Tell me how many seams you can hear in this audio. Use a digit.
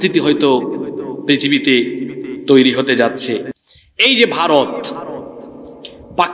1